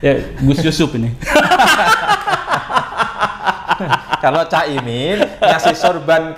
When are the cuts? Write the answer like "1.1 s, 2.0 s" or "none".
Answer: none